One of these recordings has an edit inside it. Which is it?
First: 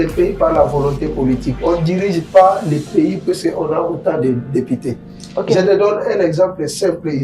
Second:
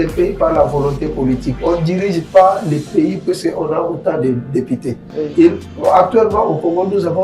second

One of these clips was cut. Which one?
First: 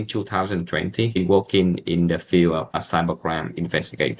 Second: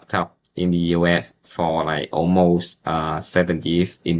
first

